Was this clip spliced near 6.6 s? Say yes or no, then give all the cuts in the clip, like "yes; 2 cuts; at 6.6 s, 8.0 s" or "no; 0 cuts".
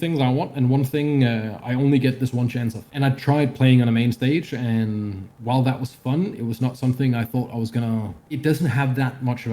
no; 2 cuts; at 2.8 s, 8.2 s